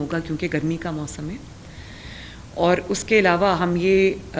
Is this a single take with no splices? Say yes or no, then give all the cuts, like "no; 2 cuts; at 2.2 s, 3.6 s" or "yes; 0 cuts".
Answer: yes; 0 cuts